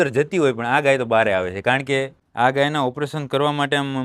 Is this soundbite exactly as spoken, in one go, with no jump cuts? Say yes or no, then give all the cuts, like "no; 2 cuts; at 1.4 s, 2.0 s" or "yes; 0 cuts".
no; 1 cut; at 2.2 s